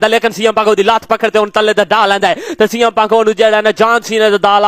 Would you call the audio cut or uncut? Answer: uncut